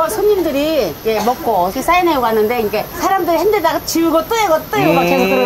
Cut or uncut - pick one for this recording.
uncut